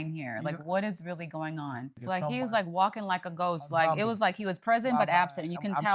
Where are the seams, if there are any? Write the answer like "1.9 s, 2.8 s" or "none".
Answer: 1.9 s

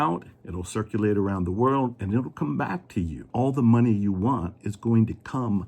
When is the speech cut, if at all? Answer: 3.2 s

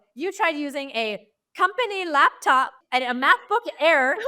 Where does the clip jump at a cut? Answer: 2.8 s

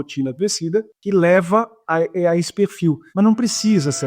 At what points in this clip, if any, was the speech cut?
1.0 s, 3.1 s

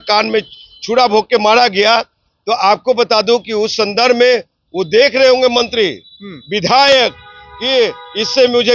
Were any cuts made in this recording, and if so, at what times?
none

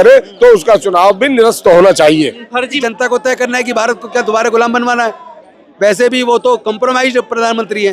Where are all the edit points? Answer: 2.7 s

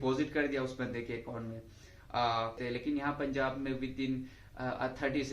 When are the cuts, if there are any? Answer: 2.6 s

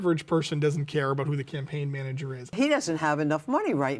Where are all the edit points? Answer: 2.5 s

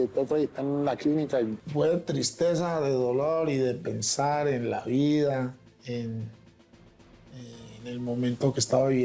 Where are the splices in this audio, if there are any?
1.6 s

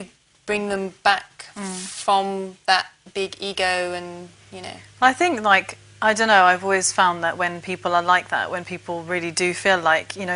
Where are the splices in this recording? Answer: 1.0 s

